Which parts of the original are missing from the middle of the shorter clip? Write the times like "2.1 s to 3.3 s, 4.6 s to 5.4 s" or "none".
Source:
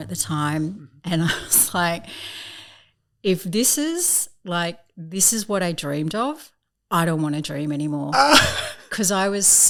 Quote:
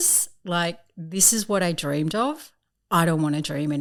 none

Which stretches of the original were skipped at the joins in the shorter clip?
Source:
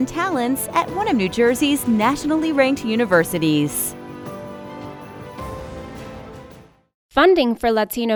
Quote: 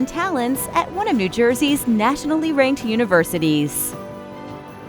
3.7 s to 4.1 s

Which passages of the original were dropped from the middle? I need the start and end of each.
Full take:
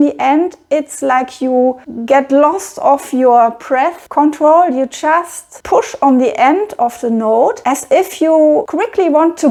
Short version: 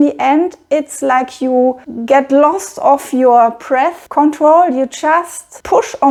none

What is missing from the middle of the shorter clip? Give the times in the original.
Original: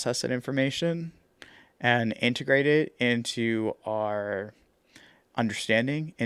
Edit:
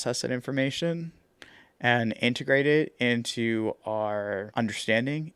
4.5 s to 5.3 s

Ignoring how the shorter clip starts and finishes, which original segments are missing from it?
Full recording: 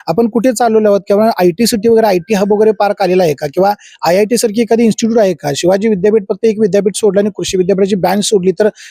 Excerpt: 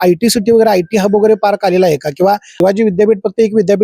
3.9 s to 5.5 s

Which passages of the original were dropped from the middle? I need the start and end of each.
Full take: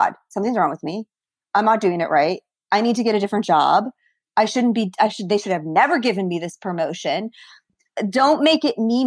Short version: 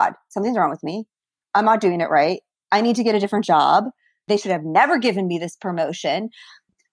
4.2 s to 5.2 s

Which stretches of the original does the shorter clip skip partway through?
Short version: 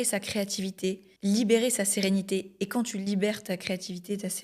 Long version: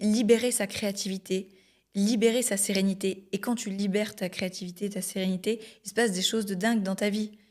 1.5 s to 1.8 s

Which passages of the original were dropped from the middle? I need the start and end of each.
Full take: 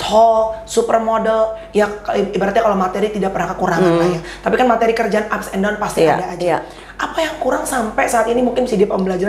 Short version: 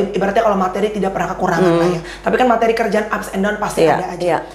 none

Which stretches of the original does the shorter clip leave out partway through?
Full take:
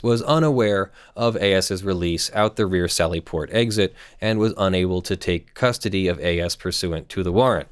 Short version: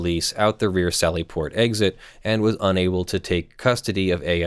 none

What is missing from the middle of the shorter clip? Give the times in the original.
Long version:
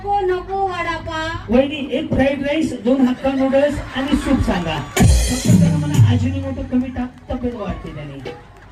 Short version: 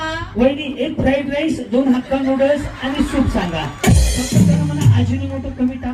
none

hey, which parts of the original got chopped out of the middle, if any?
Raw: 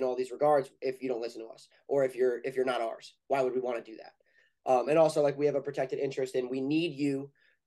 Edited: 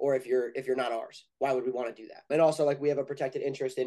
4.2 s to 4.9 s

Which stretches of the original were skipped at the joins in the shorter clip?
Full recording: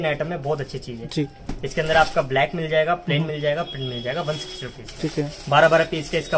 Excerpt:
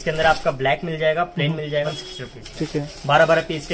3.6 s to 4.3 s

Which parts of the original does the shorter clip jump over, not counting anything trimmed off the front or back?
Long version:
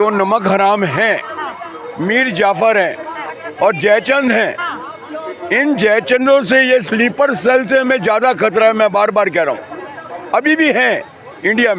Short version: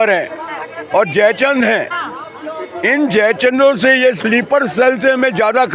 none

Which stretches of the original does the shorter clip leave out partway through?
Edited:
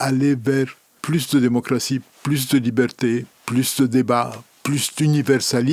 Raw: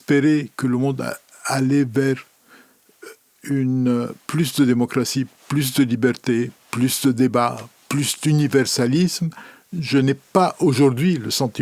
2.4 s to 4.2 s

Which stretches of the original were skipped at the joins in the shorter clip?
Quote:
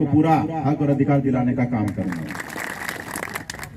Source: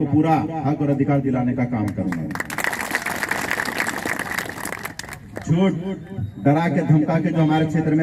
2.5 s to 4.0 s

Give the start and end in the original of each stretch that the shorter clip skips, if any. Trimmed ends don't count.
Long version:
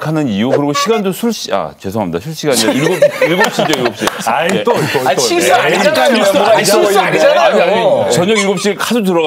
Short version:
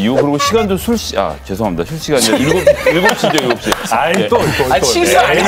none

